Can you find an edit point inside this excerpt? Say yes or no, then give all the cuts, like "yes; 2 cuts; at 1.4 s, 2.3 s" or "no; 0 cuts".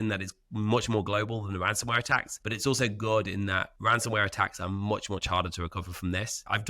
yes; 1 cut; at 2.3 s